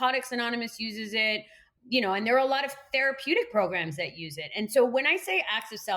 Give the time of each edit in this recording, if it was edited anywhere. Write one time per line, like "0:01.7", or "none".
none